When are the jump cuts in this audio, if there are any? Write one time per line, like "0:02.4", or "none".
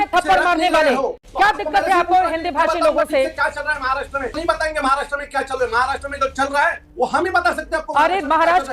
0:01.2
0:04.4